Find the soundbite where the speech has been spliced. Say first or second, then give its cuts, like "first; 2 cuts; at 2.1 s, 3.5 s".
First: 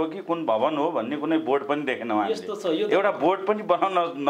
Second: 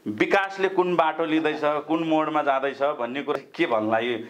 second; 1 cut; at 3.3 s